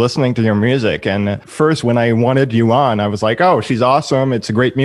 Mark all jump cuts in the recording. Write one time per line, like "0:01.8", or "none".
0:01.4

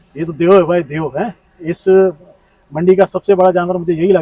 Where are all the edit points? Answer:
none

